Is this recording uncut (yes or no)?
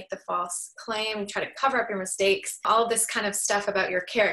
no